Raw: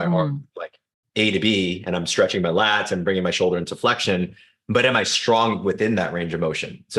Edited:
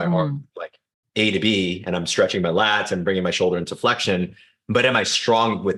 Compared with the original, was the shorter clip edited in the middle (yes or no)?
no